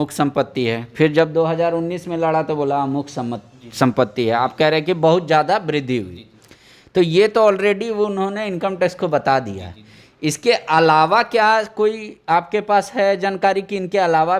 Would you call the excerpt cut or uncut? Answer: uncut